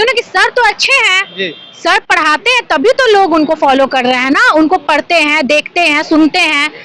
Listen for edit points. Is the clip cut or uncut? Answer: uncut